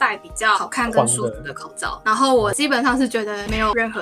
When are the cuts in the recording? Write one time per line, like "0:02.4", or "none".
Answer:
none